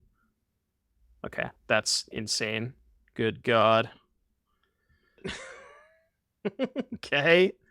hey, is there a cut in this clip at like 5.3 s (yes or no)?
yes